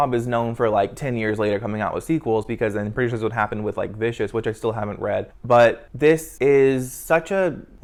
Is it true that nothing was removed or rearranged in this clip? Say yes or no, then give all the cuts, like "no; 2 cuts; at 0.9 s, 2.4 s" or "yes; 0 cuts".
yes; 0 cuts